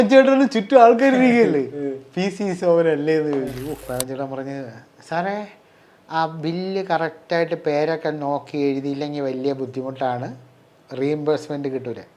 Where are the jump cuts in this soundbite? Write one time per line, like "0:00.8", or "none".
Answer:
0:03.9